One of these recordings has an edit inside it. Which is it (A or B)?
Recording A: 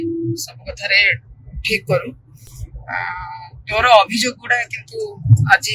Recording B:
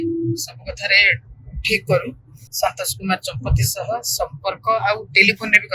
B